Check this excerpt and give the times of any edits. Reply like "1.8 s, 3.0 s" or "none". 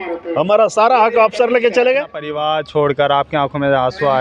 2.4 s